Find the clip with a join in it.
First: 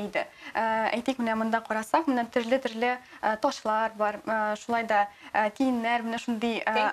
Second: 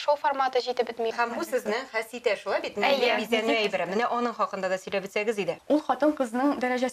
second; 2 cuts; at 1.1 s, 5.6 s

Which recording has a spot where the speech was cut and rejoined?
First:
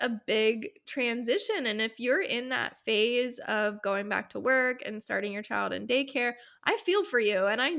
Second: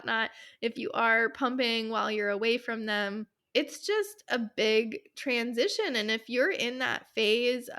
second; 1 cut; at 3.3 s

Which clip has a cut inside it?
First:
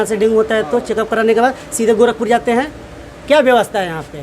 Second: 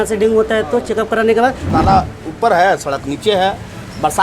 second; 1 cut; at 1.6 s

